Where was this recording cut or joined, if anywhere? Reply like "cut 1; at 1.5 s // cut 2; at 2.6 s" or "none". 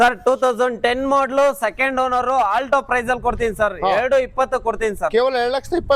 none